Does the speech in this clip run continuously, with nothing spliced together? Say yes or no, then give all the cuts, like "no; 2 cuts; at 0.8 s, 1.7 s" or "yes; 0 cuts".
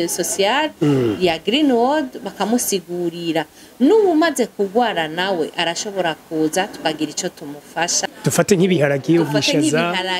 no; 1 cut; at 8.1 s